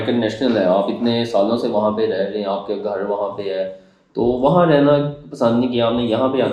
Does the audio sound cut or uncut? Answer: uncut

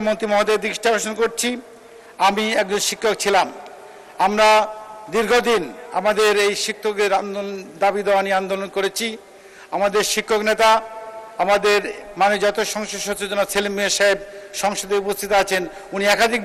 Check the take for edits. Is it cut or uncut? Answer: uncut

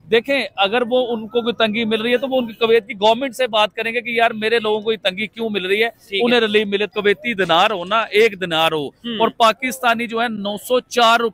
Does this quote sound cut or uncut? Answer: cut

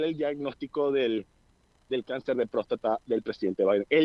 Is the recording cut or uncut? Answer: uncut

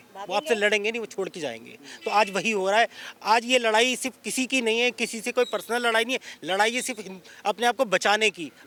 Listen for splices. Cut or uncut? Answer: uncut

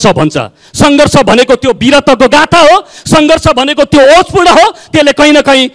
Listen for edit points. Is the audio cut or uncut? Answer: uncut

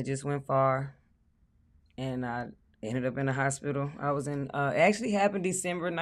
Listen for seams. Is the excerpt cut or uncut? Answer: uncut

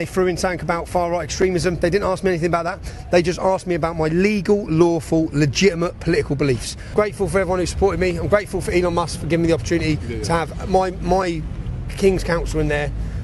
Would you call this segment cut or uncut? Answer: cut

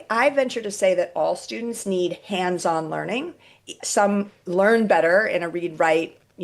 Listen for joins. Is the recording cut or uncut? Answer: cut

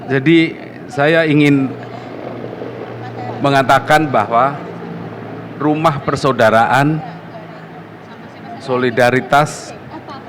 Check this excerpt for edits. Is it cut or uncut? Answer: uncut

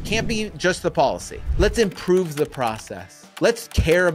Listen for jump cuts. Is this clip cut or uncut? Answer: cut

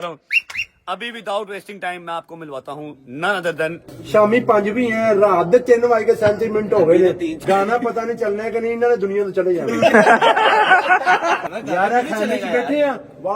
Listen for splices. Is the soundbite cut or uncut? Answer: cut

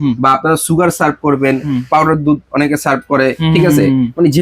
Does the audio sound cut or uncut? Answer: uncut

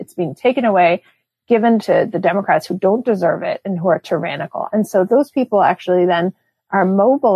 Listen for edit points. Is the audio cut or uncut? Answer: cut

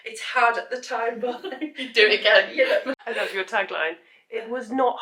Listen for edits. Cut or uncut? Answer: cut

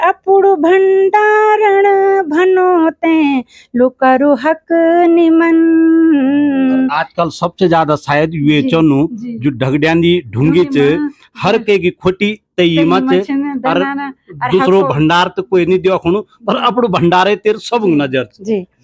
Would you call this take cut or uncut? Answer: uncut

